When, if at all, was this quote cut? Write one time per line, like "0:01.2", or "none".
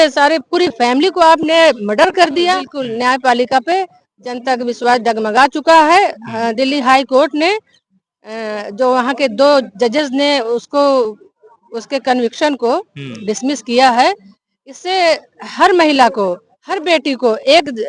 0:02.8

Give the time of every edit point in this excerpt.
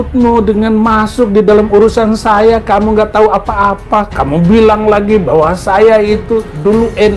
none

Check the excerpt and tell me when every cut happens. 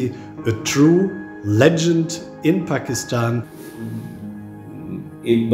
0:03.6

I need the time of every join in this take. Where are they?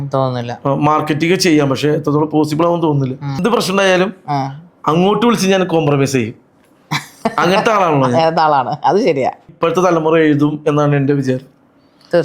0:03.4
0:09.5

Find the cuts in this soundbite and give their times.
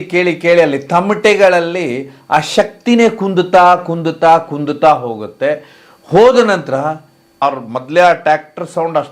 0:07.4

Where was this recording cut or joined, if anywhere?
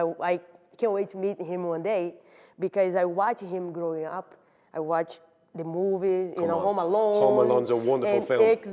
none

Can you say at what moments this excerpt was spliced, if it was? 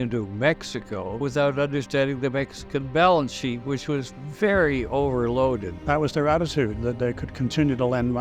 0:05.8

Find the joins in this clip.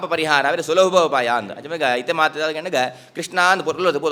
none

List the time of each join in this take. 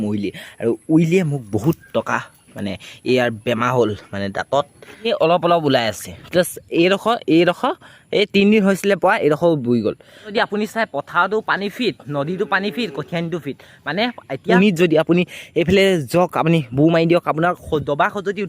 0:05.1
0:10.2
0:14.4

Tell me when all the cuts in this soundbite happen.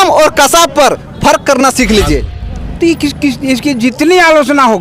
0:02.4

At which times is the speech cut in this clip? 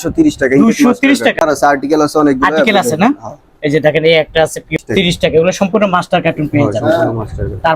0:01.4
0:04.8

